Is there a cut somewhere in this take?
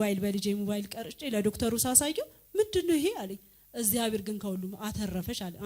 no; 0 cuts

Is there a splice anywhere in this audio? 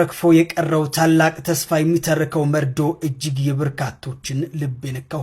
no; 0 cuts

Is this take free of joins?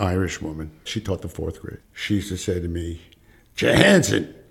no; 1 cut; at 1.8 s

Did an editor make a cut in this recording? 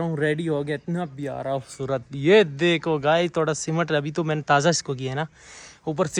no; 0 cuts

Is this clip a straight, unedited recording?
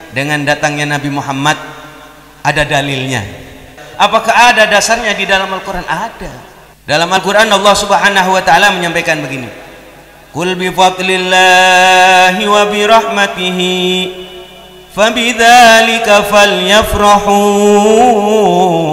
no; 2 cuts; at 3.8 s, 7.2 s

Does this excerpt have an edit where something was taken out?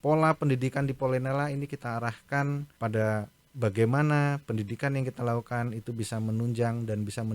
yes; 1 cut; at 2.7 s

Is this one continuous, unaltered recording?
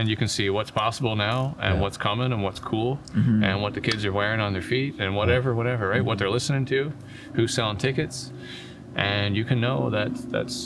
yes; 0 cuts

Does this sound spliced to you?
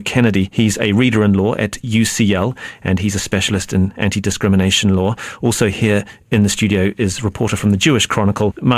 yes; 1 cut; at 4.1 s

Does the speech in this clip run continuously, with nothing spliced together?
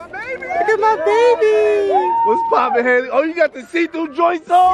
yes; 0 cuts

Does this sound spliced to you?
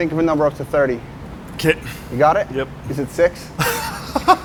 no; 0 cuts

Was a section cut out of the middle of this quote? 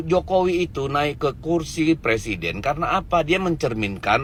no; 0 cuts

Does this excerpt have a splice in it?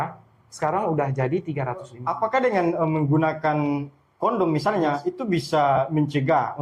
yes; 1 cut; at 2.0 s

